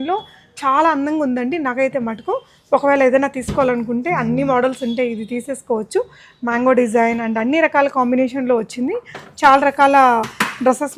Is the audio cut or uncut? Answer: uncut